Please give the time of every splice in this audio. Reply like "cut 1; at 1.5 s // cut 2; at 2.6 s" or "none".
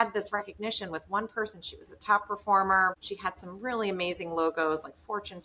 cut 1; at 3.1 s